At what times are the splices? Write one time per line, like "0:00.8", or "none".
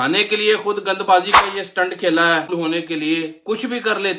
0:02.5

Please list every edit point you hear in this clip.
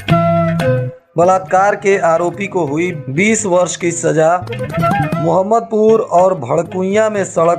0:00.9

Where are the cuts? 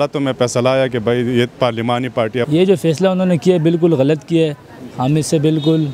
0:02.5

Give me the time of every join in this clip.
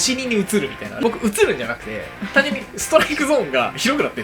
0:01.0

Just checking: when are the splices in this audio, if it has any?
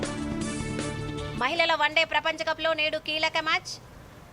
0:01.0

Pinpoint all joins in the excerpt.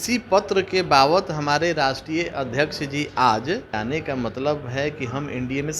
0:03.7

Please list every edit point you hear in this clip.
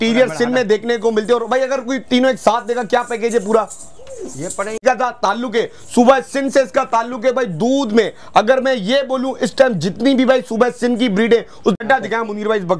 0:04.8
0:11.8

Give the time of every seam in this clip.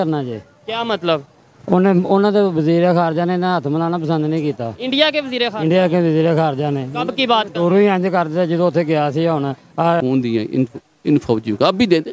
0:10.0

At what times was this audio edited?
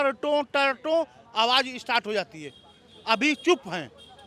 none

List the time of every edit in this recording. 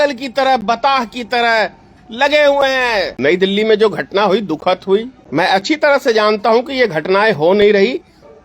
0:03.1
0:05.2

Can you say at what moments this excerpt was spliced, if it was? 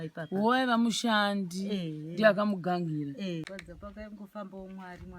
0:03.6

